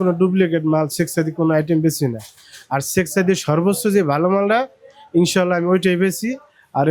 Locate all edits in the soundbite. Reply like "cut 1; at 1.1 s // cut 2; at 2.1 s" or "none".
none